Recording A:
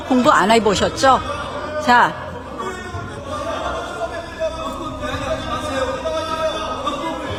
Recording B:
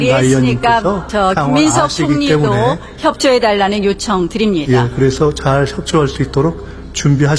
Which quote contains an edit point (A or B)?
B